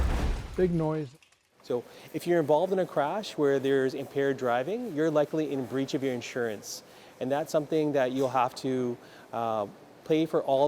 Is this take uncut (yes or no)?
no